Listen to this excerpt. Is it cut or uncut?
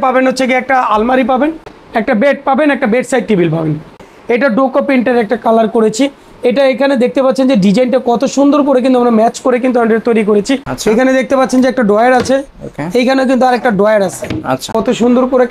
cut